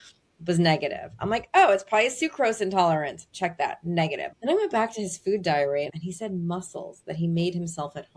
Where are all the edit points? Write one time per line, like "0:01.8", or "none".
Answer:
0:04.3
0:05.9